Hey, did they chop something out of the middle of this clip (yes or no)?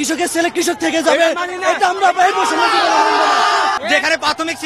yes